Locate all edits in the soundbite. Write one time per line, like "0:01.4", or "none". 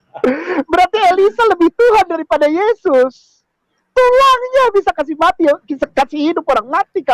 none